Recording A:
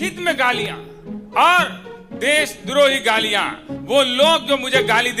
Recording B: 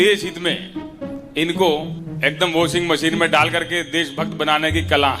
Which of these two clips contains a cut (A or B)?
B